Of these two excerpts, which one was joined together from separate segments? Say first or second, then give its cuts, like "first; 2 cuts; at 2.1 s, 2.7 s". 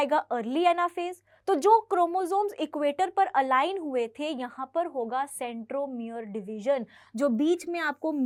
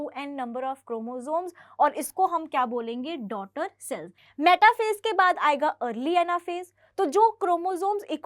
second; 1 cut; at 4.2 s